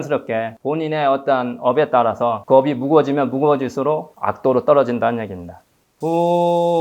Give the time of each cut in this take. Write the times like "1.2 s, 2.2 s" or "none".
4.1 s, 5.6 s